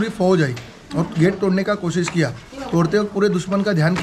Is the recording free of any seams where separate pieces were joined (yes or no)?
yes